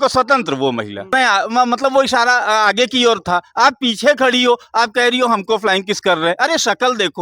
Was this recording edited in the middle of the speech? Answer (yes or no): yes